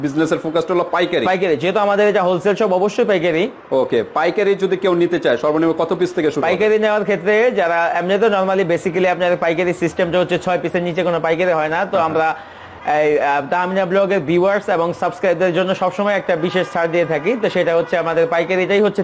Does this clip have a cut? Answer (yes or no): no